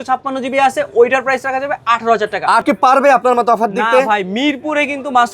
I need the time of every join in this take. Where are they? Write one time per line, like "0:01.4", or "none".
0:02.6